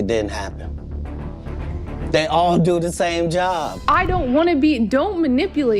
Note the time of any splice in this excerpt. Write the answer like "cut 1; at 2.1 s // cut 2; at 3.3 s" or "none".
cut 1; at 3.7 s